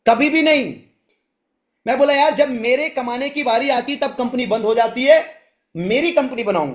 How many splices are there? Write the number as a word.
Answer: zero